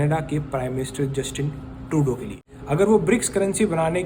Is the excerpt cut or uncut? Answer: cut